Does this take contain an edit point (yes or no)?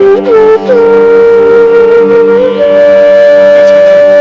no